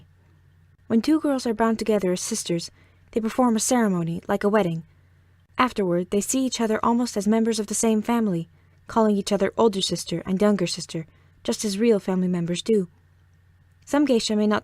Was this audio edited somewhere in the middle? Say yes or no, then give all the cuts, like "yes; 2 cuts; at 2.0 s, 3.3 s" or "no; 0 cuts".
yes; 1 cut; at 8.3 s